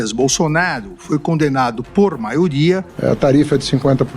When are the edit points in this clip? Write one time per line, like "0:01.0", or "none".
0:02.9